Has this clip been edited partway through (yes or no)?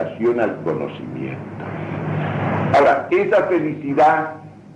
yes